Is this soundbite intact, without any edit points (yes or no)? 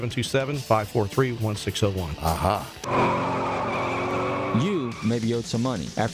no